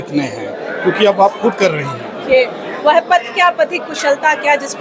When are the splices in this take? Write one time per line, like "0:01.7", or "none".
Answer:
0:02.2